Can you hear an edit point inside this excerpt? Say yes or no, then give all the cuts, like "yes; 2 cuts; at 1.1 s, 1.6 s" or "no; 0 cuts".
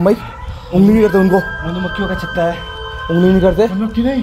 no; 0 cuts